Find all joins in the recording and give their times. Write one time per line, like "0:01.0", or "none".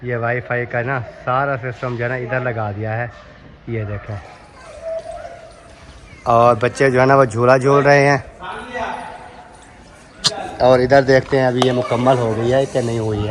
none